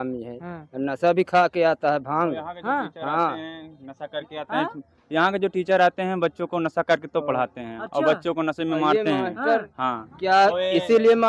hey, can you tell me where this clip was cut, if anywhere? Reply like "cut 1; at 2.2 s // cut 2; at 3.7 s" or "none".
none